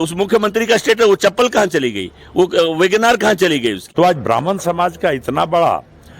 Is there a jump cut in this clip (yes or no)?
yes